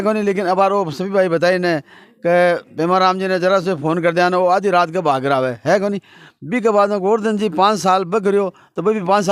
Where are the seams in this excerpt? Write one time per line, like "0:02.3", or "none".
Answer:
none